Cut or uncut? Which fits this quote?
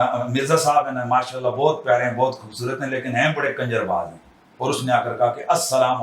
cut